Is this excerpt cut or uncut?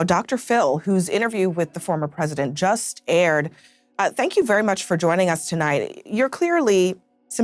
uncut